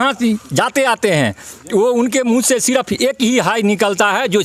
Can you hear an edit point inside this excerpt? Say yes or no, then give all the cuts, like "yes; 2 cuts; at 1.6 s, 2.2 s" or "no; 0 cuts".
no; 0 cuts